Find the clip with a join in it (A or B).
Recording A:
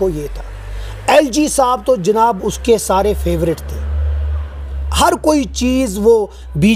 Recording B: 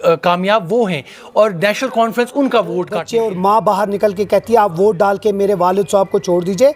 B